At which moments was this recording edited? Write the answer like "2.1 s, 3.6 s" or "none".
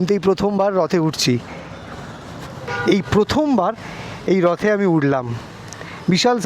2.7 s